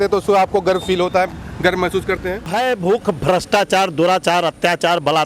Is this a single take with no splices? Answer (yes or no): no